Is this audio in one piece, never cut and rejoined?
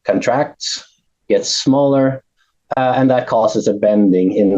yes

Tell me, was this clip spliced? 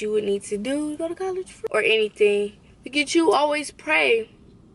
yes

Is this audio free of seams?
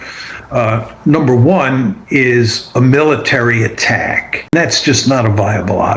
no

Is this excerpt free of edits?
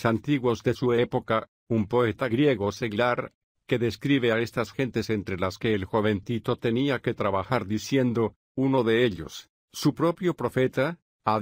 yes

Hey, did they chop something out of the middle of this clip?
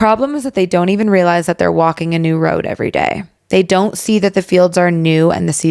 no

